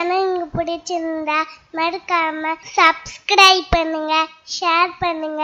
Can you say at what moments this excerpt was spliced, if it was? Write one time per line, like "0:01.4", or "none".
0:02.6